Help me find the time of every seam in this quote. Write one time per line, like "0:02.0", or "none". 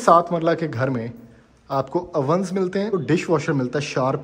0:02.9